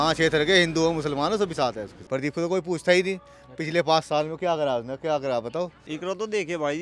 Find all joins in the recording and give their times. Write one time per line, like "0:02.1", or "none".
0:01.9
0:05.8